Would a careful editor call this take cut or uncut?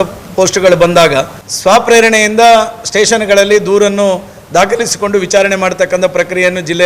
cut